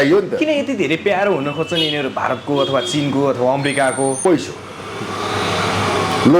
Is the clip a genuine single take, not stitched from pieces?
no; 1 cut; at 4.2 s

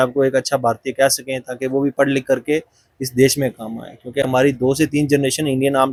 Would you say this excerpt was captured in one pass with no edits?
yes; 0 cuts

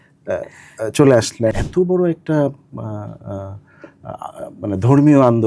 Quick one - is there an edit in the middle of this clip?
yes; 1 cut; at 1.5 s

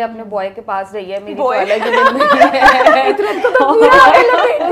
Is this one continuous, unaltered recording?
yes; 0 cuts

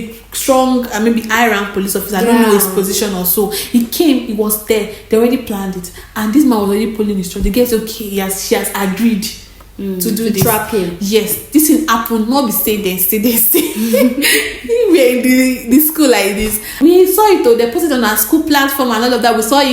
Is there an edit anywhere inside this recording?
yes; 1 cut; at 16.6 s

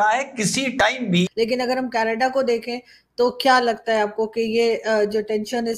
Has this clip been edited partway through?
yes; 1 cut; at 1.3 s

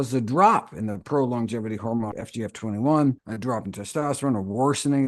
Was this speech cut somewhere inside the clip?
yes; 2 cuts; at 2.1 s, 3.3 s

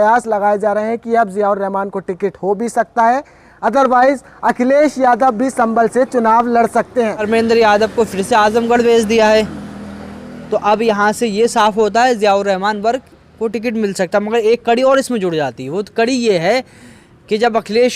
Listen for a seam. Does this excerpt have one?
yes; 1 cut; at 7.2 s

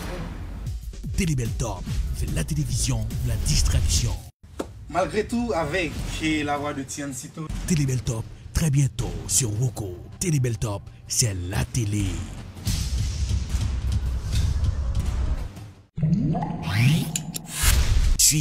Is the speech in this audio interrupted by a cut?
yes; 1 cut; at 15.8 s

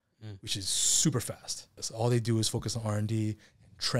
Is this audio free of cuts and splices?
no; 1 cut; at 1.8 s

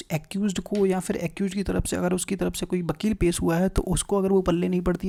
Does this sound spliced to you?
no; 0 cuts

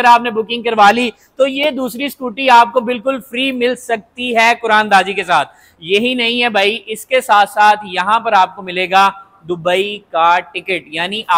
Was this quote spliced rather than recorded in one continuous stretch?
no; 0 cuts

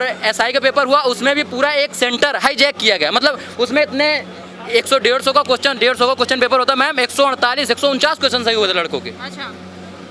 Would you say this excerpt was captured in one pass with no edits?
yes; 0 cuts

